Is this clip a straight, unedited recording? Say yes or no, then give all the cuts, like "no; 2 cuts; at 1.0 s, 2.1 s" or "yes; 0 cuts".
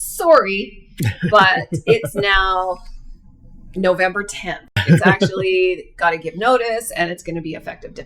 no; 1 cut; at 4.7 s